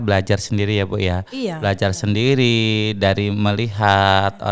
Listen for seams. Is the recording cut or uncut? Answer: uncut